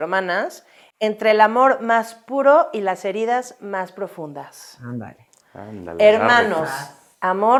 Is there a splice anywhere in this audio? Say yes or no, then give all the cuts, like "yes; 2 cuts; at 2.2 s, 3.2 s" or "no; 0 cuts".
no; 0 cuts